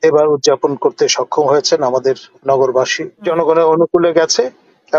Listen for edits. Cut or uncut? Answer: cut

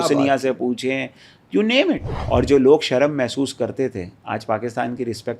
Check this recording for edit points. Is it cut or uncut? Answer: cut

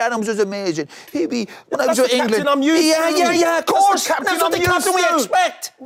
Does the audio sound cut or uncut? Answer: uncut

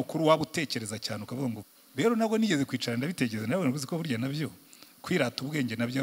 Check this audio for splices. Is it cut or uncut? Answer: cut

